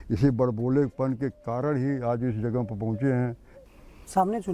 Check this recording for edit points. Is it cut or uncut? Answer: cut